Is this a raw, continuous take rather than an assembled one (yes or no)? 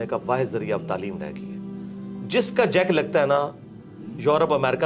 yes